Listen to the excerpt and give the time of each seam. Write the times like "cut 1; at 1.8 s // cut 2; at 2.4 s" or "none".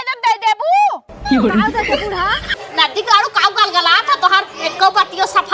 cut 1; at 2.5 s